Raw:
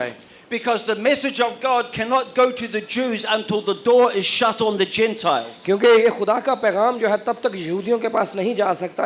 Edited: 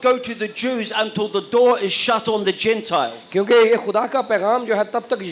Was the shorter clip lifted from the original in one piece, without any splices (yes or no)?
yes